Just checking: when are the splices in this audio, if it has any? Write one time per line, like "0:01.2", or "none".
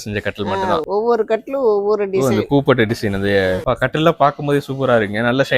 0:00.8
0:03.6